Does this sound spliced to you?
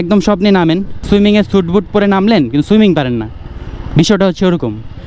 yes; 1 cut; at 1.1 s

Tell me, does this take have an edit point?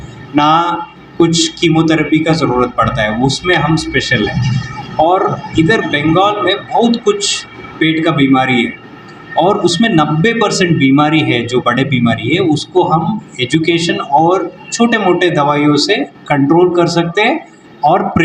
no; 0 cuts

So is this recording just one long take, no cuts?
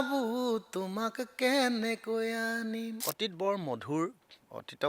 no; 1 cut; at 3.0 s

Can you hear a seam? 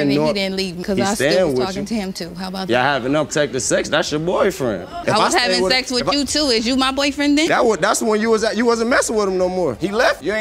no; 0 cuts

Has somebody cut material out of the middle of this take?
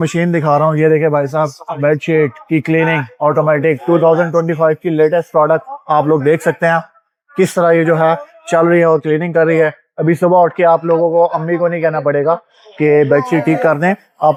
no; 0 cuts

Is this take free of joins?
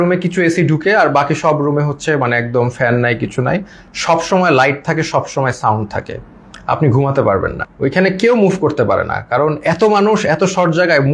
no; 1 cut; at 7.6 s

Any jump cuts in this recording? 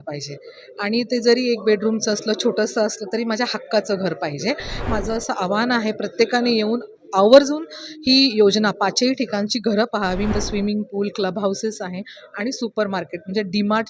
yes; 2 cuts; at 4.9 s, 10.3 s

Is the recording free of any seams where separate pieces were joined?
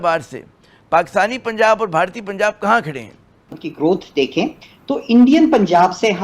no; 1 cut; at 3.5 s

